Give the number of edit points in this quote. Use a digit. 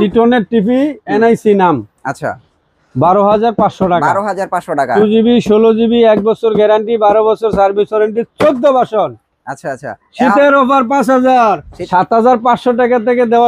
1